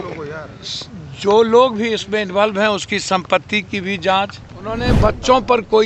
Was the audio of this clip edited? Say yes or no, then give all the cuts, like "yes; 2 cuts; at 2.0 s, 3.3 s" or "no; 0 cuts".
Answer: yes; 1 cut; at 4.9 s